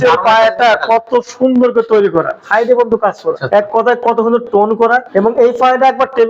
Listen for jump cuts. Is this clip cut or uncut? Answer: cut